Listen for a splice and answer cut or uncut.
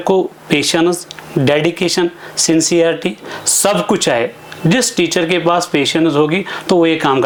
uncut